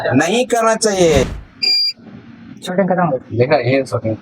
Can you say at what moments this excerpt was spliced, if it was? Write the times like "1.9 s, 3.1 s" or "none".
1.2 s